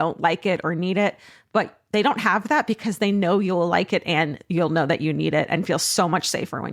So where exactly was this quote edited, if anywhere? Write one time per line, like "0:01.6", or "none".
none